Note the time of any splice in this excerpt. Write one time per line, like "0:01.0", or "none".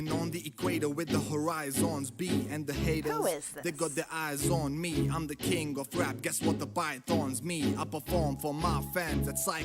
0:02.3